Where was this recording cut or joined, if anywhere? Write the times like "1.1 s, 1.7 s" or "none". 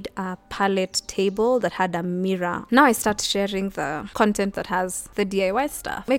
2.6 s, 4.0 s

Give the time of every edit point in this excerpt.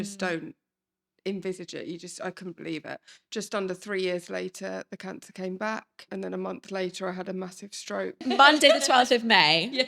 3.1 s, 6.1 s, 8.2 s

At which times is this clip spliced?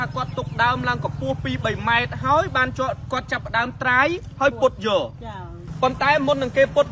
5.6 s

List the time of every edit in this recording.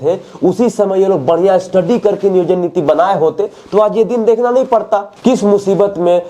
5.1 s

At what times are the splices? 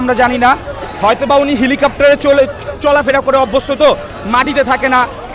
none

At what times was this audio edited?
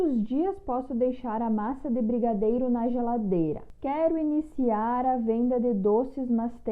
3.7 s

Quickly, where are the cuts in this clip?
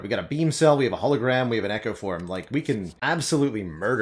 2.9 s

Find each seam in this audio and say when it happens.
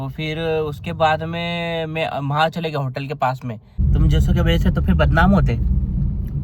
3.7 s

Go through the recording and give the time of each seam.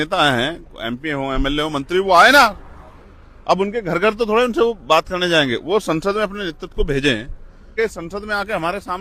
7.7 s

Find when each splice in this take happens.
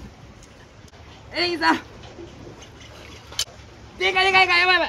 1.0 s, 3.4 s

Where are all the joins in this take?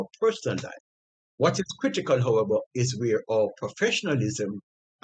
1.3 s

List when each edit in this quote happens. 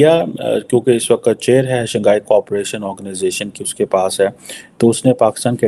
none

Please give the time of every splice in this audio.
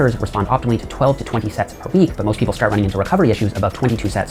none

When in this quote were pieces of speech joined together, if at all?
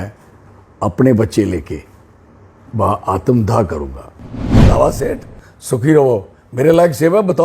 4.4 s

